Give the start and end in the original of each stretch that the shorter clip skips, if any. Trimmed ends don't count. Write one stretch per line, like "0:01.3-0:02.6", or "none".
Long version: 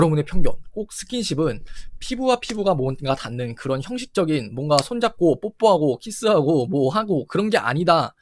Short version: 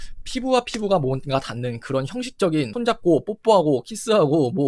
0:04.5-0:04.9